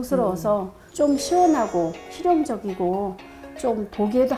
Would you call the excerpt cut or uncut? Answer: uncut